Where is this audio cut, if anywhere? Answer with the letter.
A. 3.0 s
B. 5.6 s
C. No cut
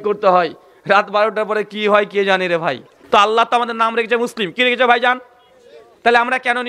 A